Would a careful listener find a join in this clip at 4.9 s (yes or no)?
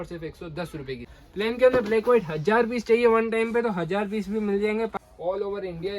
yes